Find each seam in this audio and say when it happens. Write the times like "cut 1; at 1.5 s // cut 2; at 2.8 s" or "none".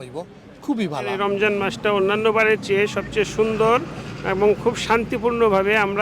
cut 1; at 1.1 s